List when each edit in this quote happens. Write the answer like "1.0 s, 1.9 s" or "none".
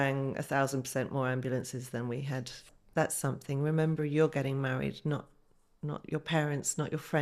2.5 s